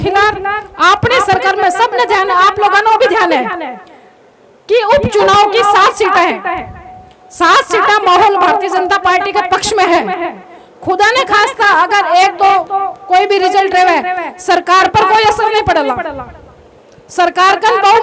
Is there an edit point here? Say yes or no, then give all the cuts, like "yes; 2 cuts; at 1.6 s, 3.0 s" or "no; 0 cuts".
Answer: no; 0 cuts